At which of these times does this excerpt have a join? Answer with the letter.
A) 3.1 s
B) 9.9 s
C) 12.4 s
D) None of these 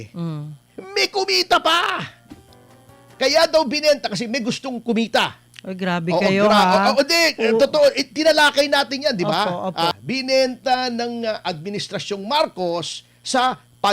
B